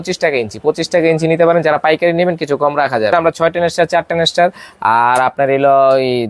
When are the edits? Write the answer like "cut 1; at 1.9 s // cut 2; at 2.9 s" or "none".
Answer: cut 1; at 3.1 s